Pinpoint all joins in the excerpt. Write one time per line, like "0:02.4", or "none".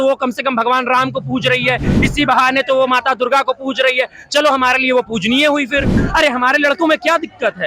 0:06.0